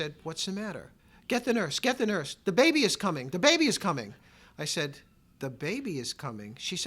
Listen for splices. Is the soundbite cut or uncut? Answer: cut